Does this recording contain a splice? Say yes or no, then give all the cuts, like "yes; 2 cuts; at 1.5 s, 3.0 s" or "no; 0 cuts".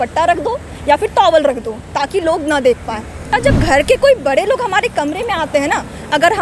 yes; 1 cut; at 3.3 s